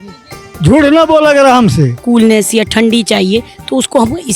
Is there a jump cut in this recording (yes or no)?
yes